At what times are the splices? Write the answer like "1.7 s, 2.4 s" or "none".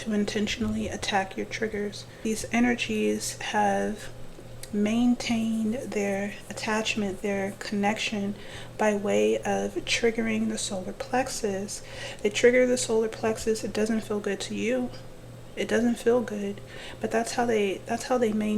2.2 s